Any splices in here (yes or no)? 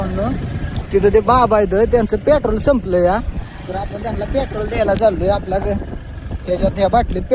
no